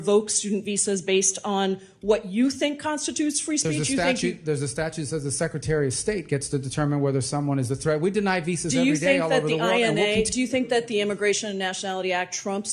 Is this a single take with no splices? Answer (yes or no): yes